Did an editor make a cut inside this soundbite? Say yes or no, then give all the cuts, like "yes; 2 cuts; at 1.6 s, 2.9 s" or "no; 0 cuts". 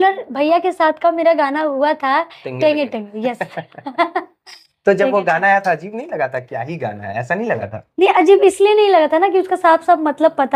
no; 0 cuts